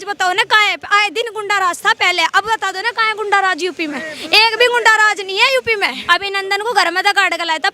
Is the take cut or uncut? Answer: cut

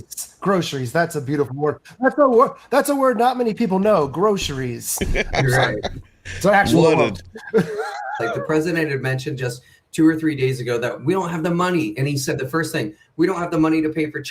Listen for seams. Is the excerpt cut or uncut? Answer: cut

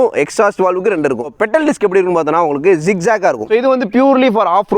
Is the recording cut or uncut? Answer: cut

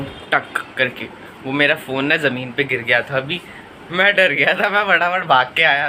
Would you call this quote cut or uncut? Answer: uncut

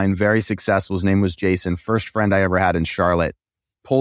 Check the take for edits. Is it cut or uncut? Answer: uncut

